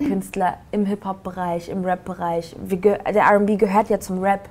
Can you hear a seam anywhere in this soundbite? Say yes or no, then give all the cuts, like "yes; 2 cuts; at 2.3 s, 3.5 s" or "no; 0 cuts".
no; 0 cuts